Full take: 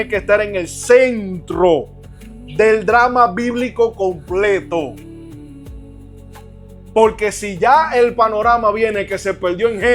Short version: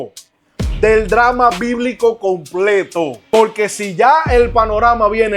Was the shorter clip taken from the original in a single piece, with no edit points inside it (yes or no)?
no